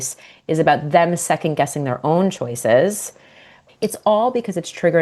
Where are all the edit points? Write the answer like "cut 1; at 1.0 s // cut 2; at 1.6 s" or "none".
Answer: cut 1; at 3.5 s